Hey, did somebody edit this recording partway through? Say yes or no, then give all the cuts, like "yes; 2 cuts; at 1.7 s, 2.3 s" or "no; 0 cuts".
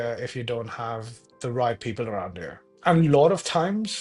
no; 0 cuts